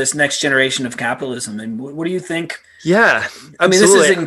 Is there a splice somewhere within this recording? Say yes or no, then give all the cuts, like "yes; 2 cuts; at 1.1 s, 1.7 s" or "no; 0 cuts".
yes; 1 cut; at 2.6 s